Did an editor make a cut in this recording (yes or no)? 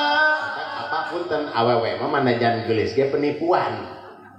yes